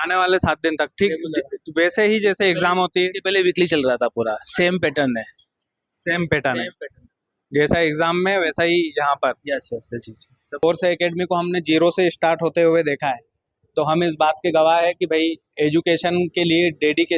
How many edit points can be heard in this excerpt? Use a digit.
1